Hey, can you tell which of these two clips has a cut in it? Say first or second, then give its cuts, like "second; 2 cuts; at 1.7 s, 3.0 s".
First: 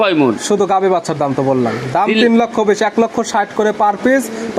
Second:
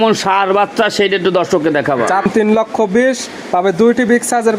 second; 1 cut; at 2.2 s